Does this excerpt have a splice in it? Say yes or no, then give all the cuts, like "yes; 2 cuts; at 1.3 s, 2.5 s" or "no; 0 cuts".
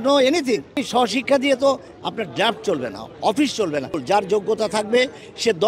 yes; 2 cuts; at 0.8 s, 4.0 s